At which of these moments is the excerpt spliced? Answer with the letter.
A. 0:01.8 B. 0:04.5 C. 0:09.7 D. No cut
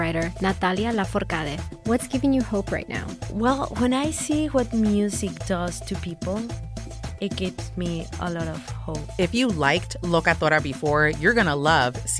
D